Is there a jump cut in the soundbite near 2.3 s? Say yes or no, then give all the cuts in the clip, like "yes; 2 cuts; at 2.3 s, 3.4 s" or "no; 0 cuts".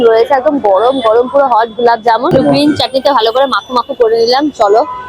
yes; 1 cut; at 2.3 s